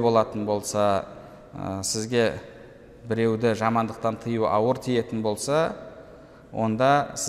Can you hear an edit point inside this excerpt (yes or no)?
no